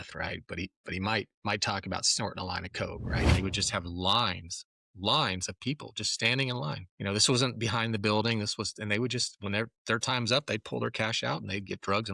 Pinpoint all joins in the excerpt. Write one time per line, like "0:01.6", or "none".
0:03.3
0:06.9